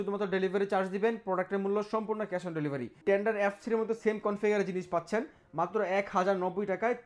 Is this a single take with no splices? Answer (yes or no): no